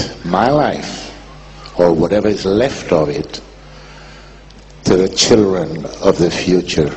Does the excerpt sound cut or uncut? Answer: cut